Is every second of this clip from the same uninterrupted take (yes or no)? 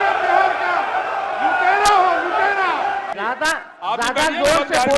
no